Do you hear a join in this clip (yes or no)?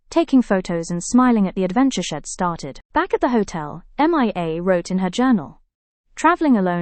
no